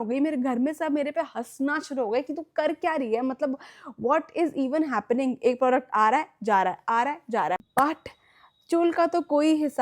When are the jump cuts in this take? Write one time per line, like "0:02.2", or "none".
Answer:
0:07.6